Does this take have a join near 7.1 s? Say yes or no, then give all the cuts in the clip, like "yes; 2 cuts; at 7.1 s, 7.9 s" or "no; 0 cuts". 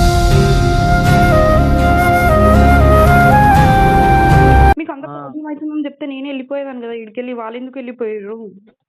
no; 1 cut; at 4.8 s